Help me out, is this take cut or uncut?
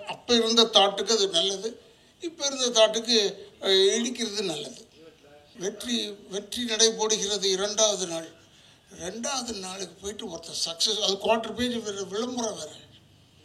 cut